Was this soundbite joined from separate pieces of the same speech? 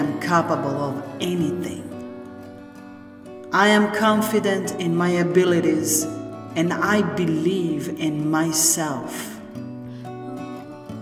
yes; 1 cut; at 9.1 s

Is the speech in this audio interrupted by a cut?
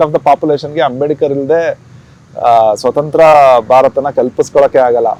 no; 0 cuts

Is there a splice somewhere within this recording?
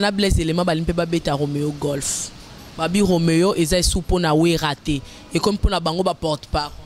no; 0 cuts

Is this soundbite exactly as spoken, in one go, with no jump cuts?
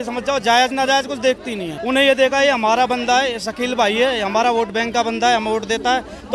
no; 1 cut; at 1.7 s

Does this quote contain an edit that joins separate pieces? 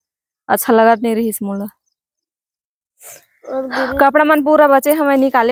no; 0 cuts

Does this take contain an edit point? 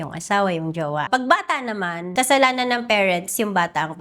yes; 2 cuts; at 1.0 s, 2.0 s

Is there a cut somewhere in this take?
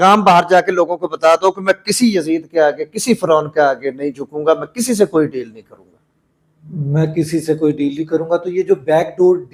no; 0 cuts

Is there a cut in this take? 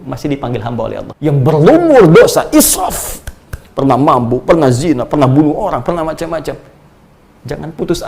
yes; 1 cut; at 1.1 s

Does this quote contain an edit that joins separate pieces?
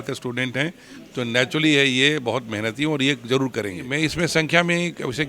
yes; 1 cut; at 3.8 s

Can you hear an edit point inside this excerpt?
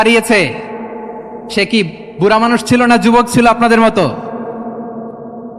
no; 0 cuts

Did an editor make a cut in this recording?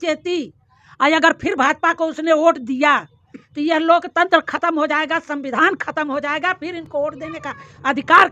no; 0 cuts

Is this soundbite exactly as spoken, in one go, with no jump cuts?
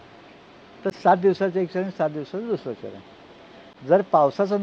yes; 0 cuts

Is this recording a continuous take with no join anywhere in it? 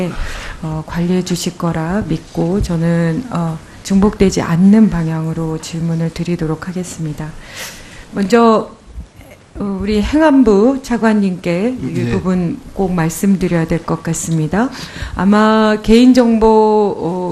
yes; 0 cuts

